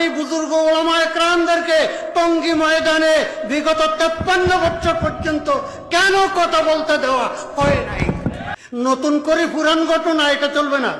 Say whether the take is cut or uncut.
cut